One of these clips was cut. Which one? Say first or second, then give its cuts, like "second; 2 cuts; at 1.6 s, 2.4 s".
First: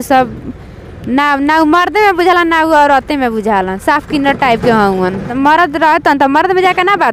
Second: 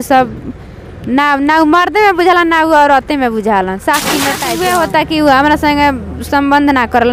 second; 1 cut; at 4.4 s